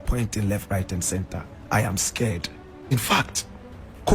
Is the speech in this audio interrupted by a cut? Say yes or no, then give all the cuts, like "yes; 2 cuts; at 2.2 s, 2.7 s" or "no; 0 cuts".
yes; 1 cut; at 2.9 s